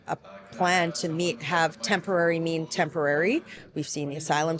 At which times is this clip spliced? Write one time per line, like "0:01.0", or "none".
0:03.6